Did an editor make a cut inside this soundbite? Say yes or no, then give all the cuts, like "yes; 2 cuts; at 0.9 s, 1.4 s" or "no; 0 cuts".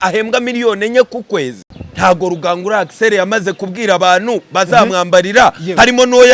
yes; 1 cut; at 1.6 s